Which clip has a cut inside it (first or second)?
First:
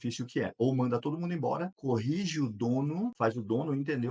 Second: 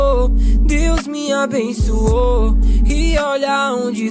first